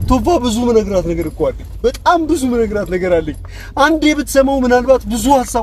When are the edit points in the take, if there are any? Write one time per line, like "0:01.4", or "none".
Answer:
none

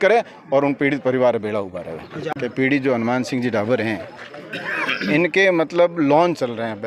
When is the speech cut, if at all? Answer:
0:02.2

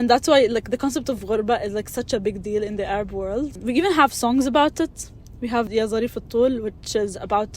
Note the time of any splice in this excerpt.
0:05.7

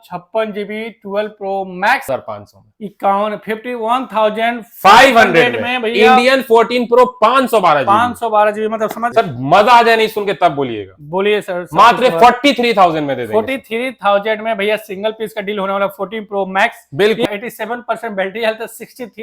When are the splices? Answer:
0:02.1
0:09.0
0:17.2

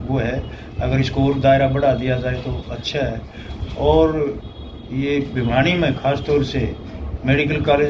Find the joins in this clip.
none

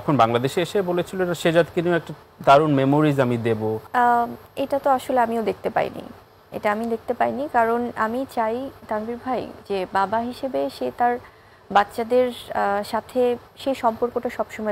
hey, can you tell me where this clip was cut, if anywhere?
0:03.8

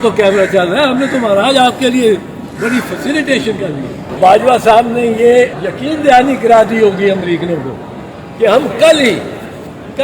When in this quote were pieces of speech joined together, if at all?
0:04.2
0:05.6

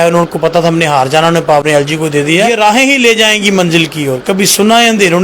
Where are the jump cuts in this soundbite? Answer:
0:02.5

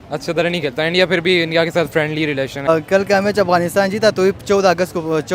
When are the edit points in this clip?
0:02.7

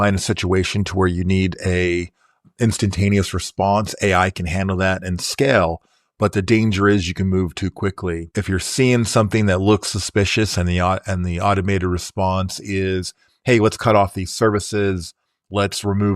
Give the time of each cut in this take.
0:08.3

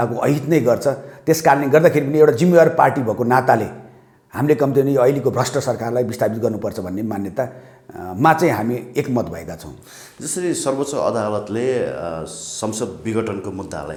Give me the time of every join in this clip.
none

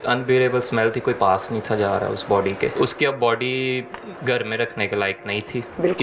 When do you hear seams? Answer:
0:02.7

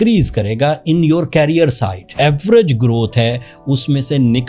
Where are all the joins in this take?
0:02.1

